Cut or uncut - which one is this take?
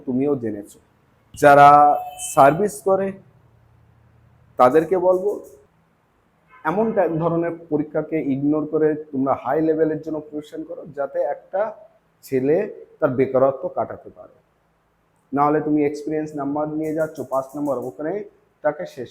cut